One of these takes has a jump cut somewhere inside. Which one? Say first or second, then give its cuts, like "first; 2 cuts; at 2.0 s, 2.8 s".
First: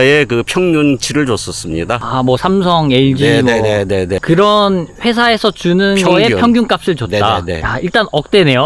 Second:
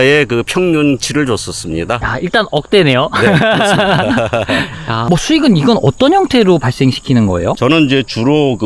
second; 3 cuts; at 2.0 s, 5.0 s, 7.6 s